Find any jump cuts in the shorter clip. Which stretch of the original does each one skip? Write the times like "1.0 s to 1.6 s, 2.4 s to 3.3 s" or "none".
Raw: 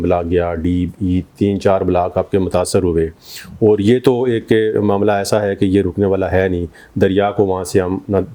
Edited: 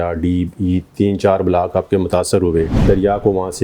3.1 s to 6.9 s